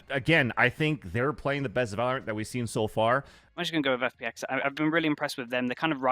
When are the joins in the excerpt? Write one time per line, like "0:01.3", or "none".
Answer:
0:03.4